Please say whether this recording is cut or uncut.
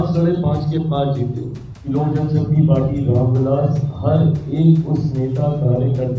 cut